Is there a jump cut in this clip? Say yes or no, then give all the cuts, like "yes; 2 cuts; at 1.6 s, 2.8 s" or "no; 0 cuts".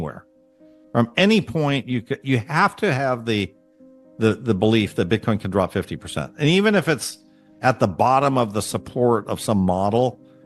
no; 0 cuts